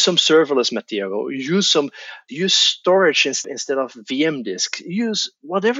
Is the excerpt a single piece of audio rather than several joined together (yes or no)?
no